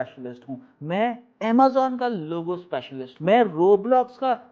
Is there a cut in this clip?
yes; 1 cut; at 3.1 s

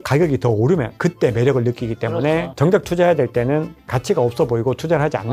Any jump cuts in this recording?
yes; 2 cuts; at 2.6 s, 3.8 s

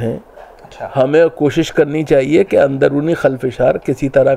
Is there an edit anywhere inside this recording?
no; 0 cuts

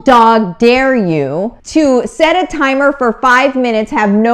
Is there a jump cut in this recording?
yes; 1 cut; at 1.6 s

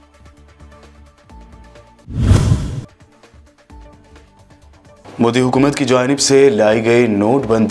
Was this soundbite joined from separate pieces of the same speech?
yes; 1 cut; at 1.5 s

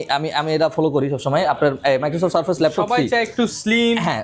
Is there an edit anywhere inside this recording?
no; 0 cuts

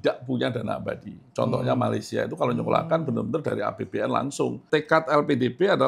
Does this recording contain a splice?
yes; 1 cut; at 4.6 s

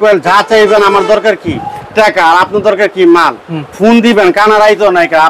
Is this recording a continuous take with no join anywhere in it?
yes; 0 cuts

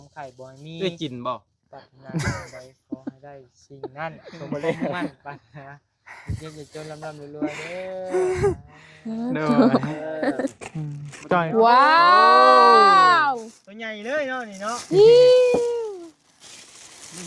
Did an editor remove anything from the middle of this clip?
yes; 1 cut; at 10.6 s

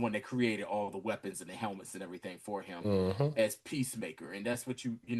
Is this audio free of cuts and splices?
yes; 0 cuts

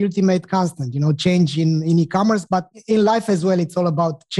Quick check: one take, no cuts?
no; 1 cut; at 2.7 s

